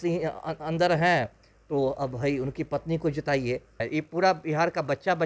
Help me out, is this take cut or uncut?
cut